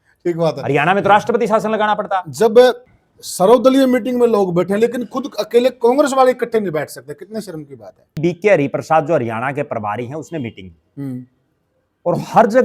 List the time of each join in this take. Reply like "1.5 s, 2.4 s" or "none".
2.9 s, 8.2 s